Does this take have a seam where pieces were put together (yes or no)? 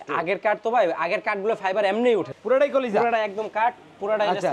yes